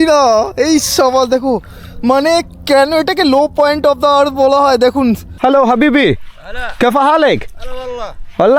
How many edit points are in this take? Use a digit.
1